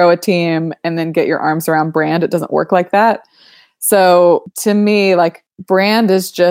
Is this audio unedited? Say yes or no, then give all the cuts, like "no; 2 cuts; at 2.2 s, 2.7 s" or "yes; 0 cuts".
no; 2 cuts; at 4.5 s, 5.5 s